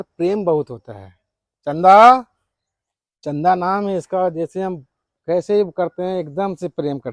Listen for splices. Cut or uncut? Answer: uncut